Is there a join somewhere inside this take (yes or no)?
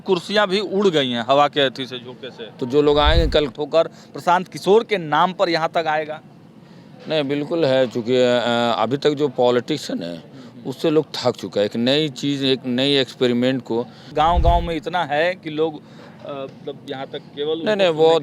yes